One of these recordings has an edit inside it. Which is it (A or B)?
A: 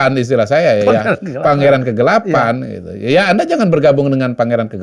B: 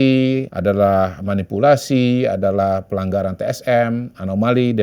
B